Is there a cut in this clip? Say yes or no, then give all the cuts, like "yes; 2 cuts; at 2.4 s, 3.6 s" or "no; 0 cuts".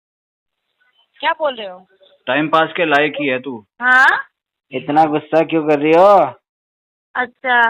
yes; 1 cut; at 3.7 s